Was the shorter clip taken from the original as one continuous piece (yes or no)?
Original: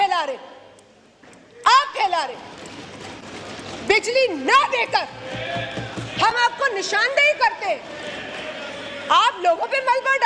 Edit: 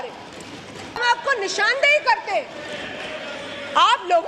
no